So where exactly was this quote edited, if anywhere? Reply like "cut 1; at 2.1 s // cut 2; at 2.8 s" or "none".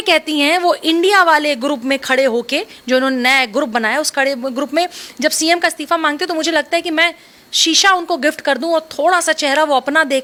none